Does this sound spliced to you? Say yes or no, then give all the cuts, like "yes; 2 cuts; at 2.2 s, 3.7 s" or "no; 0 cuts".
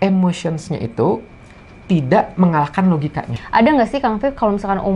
yes; 1 cut; at 3.3 s